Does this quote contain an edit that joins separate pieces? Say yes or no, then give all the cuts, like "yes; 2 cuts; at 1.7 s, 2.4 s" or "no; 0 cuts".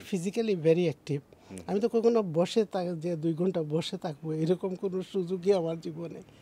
no; 0 cuts